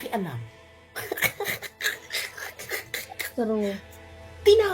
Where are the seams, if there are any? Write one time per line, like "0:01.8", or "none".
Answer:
0:03.3